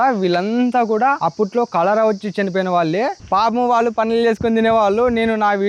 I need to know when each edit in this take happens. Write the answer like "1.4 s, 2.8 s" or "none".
1.2 s, 3.2 s